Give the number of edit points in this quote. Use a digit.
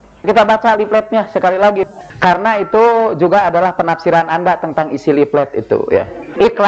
1